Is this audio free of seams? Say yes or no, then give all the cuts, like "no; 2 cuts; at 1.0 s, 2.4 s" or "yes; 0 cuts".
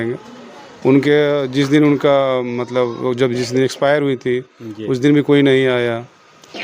yes; 0 cuts